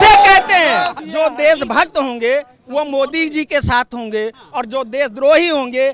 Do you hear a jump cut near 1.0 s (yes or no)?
yes